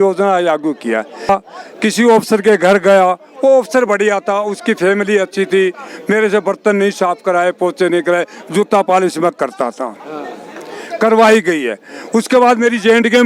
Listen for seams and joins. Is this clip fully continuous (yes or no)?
no